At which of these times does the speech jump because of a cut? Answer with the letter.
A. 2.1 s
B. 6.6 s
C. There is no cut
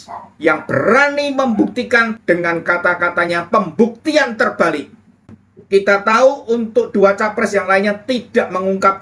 A